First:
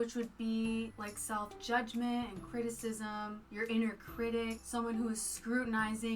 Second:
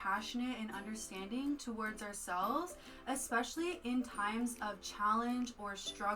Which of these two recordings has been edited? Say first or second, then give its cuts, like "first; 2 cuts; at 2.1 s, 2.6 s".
first; 3 cuts; at 0.9 s, 3.4 s, 4.6 s